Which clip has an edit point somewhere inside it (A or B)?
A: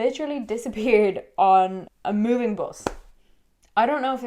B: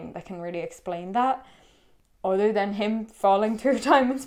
A